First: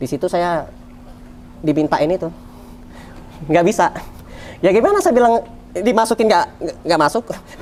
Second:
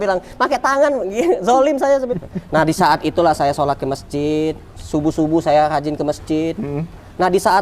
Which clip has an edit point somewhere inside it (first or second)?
second